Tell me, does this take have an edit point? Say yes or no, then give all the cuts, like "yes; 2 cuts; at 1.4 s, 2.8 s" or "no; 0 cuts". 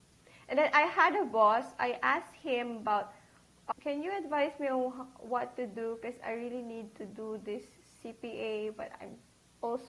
yes; 1 cut; at 3.5 s